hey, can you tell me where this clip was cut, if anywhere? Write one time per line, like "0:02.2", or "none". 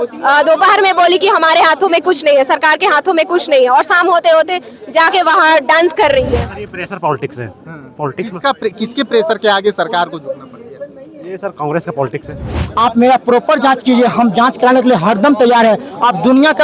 0:06.5
0:12.7